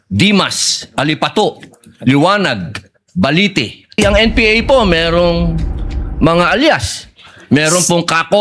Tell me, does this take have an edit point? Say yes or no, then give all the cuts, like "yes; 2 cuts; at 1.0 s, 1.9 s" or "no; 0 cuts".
yes; 1 cut; at 4.0 s